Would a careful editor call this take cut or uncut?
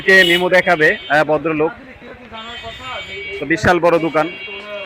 uncut